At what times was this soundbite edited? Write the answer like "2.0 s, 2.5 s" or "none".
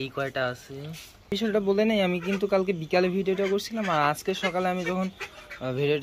1.3 s